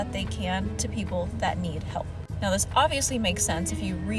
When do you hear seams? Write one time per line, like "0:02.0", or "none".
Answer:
none